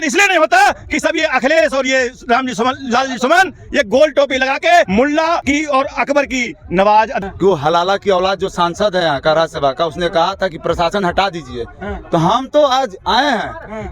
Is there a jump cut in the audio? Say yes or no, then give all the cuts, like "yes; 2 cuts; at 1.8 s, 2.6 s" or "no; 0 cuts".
yes; 2 cuts; at 5.1 s, 7.2 s